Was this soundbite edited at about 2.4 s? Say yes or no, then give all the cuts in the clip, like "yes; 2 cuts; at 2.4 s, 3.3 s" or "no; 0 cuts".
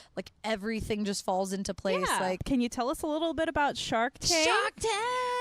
yes; 1 cut; at 2.4 s